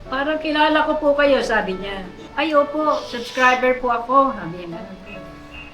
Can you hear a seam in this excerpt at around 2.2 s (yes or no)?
yes